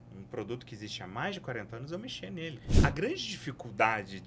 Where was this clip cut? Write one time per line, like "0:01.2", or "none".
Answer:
0:02.7